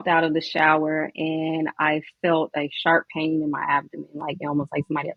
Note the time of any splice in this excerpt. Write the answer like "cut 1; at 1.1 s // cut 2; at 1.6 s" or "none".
none